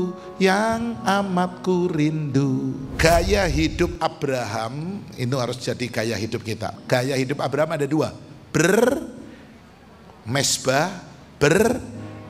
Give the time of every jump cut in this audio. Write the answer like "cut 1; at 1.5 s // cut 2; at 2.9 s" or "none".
cut 1; at 2.9 s // cut 2; at 6.7 s